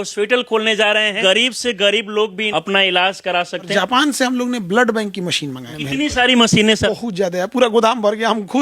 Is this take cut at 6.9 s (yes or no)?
yes